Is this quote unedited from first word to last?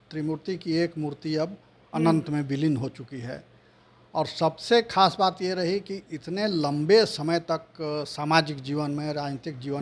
yes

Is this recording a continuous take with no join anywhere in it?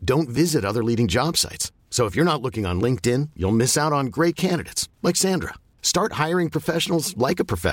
yes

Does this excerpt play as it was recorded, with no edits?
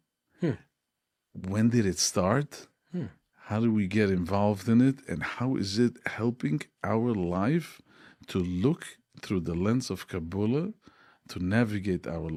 yes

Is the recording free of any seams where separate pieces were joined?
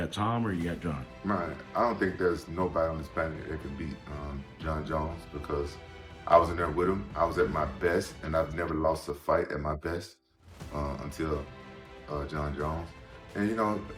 yes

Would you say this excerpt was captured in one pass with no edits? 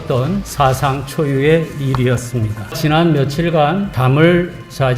no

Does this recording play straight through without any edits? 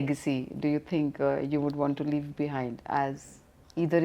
yes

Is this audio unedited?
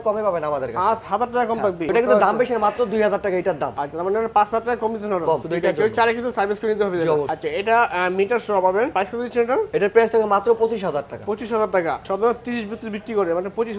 yes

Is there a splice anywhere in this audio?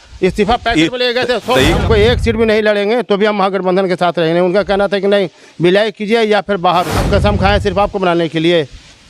yes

